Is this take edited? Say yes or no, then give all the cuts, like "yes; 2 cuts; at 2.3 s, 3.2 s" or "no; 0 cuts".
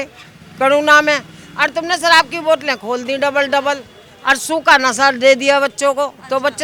no; 0 cuts